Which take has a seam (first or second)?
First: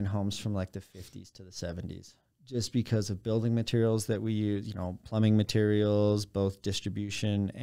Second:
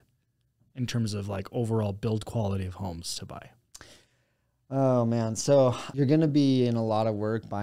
second